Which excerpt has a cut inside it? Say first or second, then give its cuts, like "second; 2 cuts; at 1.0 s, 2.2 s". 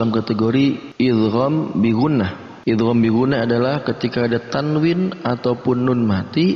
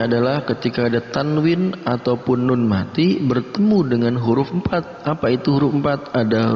first; 2 cuts; at 0.8 s, 2.5 s